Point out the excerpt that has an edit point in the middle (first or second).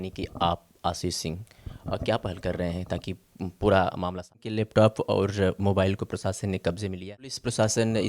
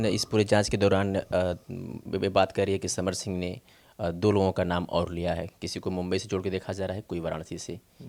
first